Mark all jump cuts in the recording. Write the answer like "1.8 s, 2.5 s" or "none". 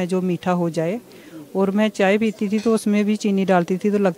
none